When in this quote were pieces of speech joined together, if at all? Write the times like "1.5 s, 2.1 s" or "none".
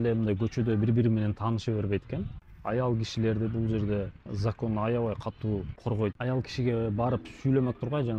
6.1 s